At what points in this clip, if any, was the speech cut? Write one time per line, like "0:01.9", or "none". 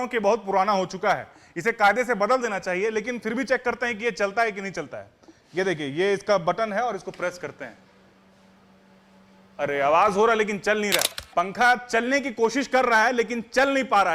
0:11.1